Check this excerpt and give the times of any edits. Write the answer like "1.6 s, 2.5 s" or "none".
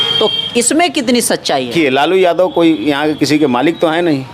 1.7 s

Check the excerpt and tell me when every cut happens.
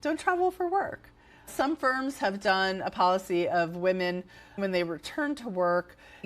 1.5 s, 4.6 s

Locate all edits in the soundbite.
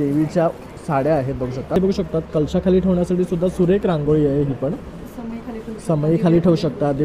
1.8 s

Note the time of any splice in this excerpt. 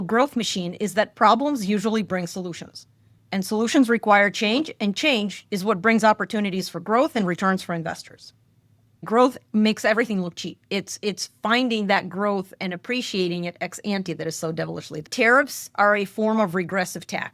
9.0 s, 15.1 s

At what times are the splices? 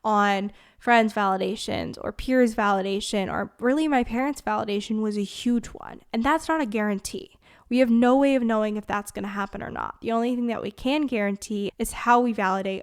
11.7 s

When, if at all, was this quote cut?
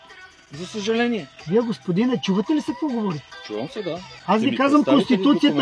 1.3 s, 4.1 s

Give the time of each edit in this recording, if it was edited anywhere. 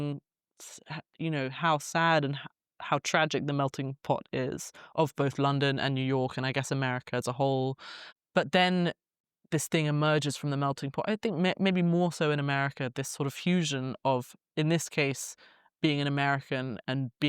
15.7 s

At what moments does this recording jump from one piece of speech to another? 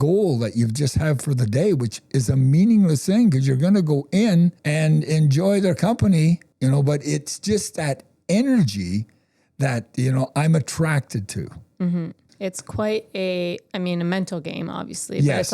4.6 s, 6.5 s, 12.2 s

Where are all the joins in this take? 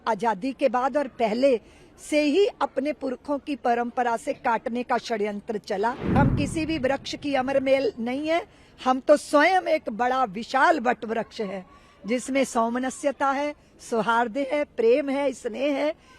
6.2 s

